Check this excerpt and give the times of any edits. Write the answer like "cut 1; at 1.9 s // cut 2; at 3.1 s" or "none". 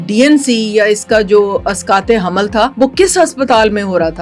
cut 1; at 2.7 s

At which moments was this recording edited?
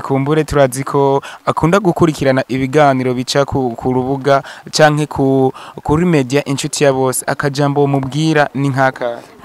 none

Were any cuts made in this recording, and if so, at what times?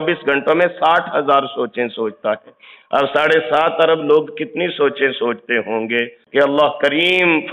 cut 1; at 6.2 s

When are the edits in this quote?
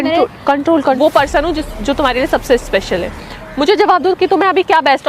cut 1; at 1.0 s

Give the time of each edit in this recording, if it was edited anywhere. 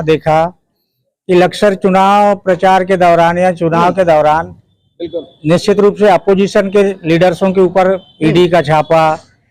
none

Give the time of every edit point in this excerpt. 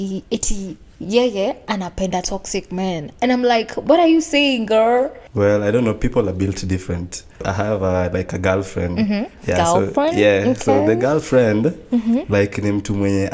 cut 1; at 5.2 s // cut 2; at 7.4 s // cut 3; at 9.4 s

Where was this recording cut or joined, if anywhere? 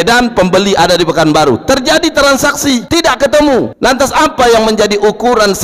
cut 1; at 2.8 s // cut 2; at 3.7 s

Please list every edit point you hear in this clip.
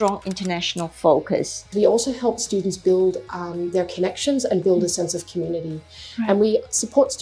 cut 1; at 1.7 s

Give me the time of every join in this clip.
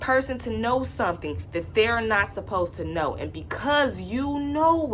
none

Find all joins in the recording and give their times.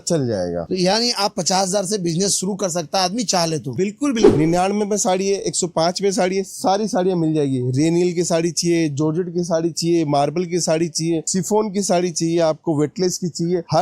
cut 1; at 4.3 s

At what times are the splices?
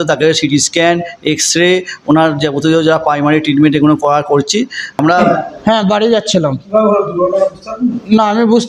cut 1; at 5.2 s

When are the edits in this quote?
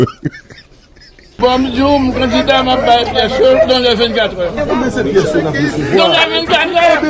cut 1; at 1.2 s

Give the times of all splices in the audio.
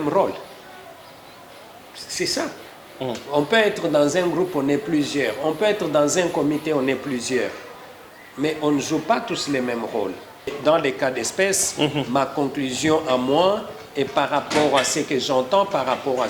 cut 1; at 10.5 s

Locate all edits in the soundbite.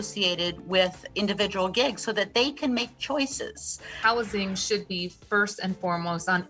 cut 1; at 4.0 s

